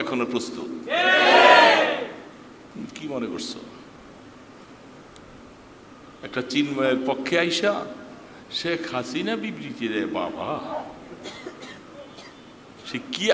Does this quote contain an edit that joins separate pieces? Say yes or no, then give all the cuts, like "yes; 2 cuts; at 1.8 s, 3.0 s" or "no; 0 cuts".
no; 0 cuts